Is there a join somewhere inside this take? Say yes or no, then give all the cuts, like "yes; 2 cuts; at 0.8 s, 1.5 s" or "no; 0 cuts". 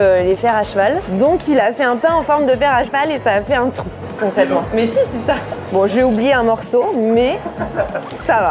no; 0 cuts